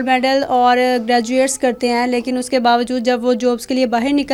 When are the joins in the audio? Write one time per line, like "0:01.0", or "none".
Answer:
none